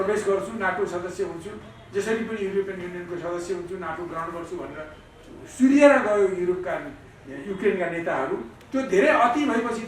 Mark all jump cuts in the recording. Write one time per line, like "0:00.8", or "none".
0:08.5